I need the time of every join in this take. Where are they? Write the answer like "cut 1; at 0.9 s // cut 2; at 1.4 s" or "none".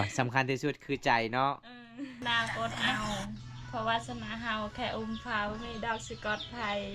cut 1; at 2.1 s